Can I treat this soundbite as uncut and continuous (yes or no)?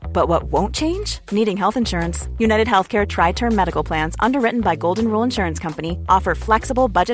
yes